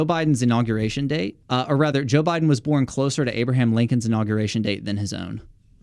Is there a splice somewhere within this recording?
yes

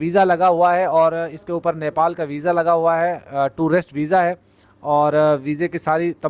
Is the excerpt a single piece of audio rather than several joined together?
yes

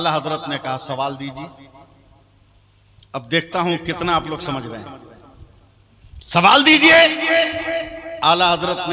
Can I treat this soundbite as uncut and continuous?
yes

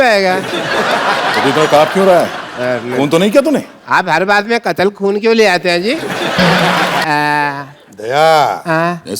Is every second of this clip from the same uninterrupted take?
no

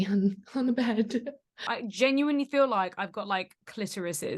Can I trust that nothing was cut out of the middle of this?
no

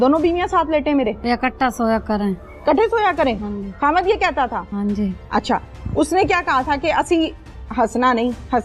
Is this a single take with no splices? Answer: no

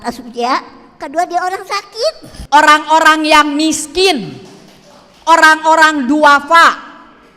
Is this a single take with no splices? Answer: no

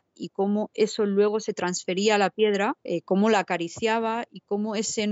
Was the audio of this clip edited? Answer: yes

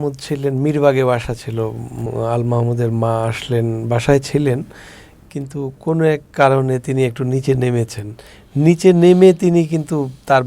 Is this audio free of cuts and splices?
no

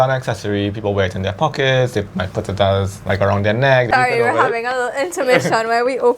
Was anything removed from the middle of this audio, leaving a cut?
yes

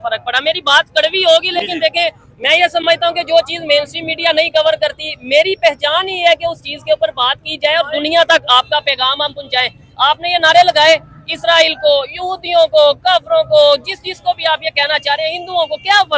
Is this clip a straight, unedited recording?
yes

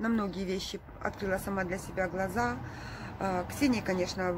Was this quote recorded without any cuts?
yes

